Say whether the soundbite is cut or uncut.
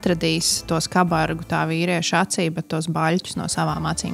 uncut